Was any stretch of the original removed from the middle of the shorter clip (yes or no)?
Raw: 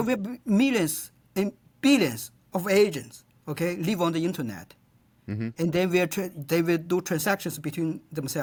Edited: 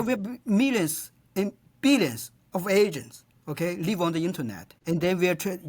yes